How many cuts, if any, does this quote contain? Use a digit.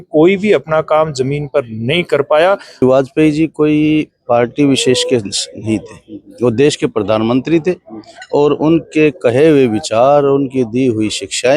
1